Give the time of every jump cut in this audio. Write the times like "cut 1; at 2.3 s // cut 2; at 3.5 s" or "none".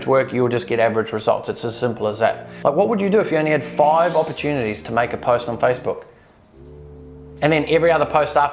none